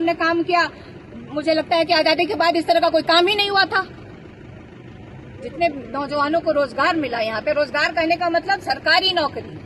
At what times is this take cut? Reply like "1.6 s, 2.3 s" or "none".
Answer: none